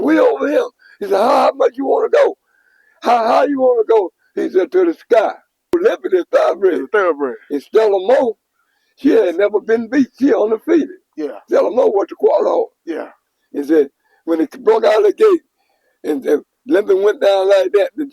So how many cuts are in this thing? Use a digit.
1